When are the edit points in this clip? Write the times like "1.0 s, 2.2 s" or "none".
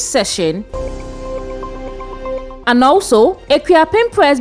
0.7 s, 2.5 s